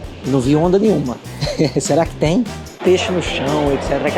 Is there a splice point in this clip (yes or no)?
yes